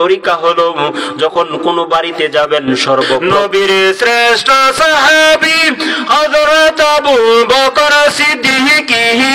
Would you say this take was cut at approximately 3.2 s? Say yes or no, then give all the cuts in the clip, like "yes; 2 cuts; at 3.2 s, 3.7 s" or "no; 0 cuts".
yes; 1 cut; at 3.2 s